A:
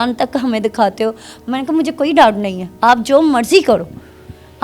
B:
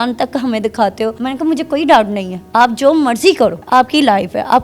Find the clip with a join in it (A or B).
B